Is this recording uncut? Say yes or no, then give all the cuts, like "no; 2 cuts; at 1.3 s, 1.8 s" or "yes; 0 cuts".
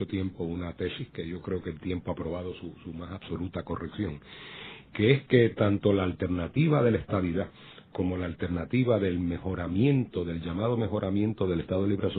no; 1 cut; at 5.7 s